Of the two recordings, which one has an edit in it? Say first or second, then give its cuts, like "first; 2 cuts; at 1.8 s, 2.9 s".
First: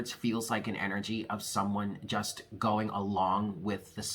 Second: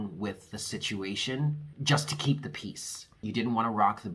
second; 2 cuts; at 1.7 s, 3.3 s